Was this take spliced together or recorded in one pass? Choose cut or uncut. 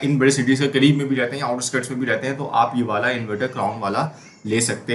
uncut